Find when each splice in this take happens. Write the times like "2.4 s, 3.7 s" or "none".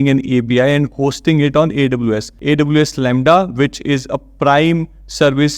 2.3 s